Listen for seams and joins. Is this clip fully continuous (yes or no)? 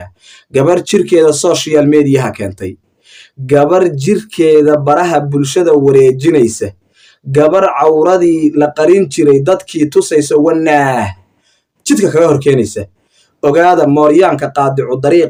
yes